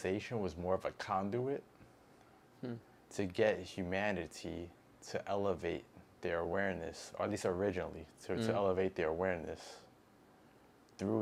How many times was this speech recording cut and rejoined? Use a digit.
0